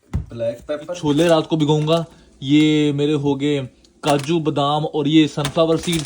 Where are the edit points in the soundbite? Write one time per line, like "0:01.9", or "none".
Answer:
0:01.0